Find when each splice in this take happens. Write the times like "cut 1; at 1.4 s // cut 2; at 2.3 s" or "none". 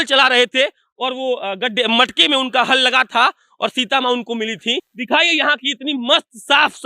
cut 1; at 4.9 s